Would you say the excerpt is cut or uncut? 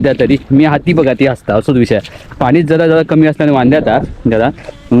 uncut